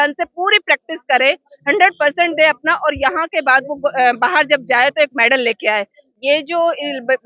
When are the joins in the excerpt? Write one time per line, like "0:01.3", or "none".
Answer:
0:06.1